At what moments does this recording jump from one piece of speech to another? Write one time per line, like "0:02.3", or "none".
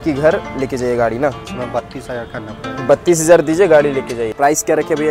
0:01.5
0:04.3